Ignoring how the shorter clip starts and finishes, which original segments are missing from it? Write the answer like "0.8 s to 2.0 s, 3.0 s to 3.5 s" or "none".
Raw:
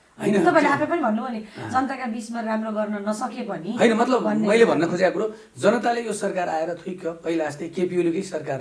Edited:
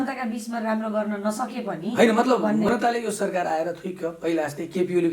4.5 s to 5.7 s